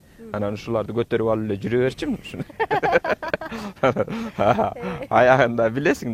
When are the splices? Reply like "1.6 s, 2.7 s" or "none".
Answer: none